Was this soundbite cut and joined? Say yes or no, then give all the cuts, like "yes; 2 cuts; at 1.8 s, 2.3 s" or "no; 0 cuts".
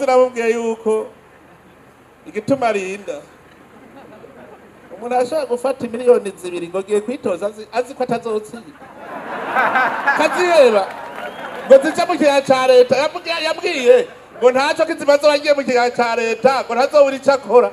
no; 0 cuts